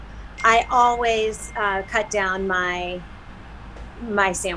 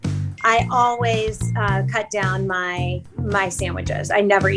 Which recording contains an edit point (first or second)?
second